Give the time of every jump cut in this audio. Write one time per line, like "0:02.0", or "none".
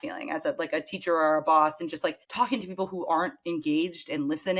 0:02.2